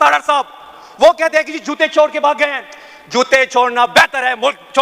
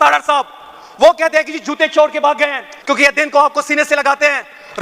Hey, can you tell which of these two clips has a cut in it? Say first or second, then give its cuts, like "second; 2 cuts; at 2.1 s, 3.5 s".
second; 1 cut; at 2.7 s